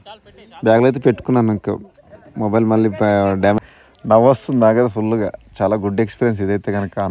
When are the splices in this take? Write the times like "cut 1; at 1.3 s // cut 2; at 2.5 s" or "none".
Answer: cut 1; at 3.6 s